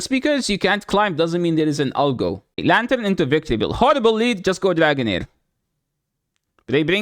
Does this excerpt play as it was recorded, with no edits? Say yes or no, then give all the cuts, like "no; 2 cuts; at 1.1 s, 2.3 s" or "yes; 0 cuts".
no; 1 cut; at 2.6 s